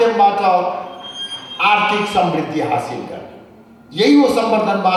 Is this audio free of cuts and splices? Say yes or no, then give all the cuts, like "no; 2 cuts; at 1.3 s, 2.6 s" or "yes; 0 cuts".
yes; 0 cuts